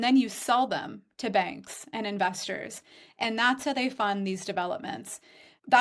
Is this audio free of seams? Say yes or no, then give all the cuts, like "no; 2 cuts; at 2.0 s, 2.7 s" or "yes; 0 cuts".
yes; 0 cuts